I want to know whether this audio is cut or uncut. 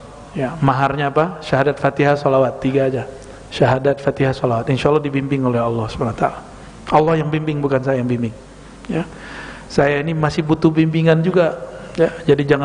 uncut